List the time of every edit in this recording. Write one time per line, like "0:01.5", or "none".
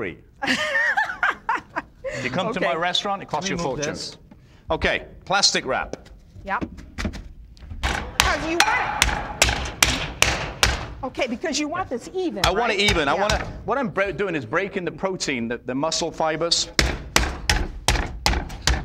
0:07.8